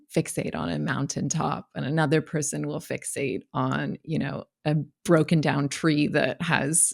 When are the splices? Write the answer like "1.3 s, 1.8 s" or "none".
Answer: none